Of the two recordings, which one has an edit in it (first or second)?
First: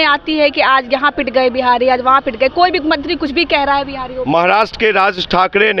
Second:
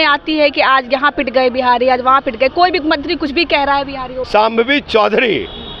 second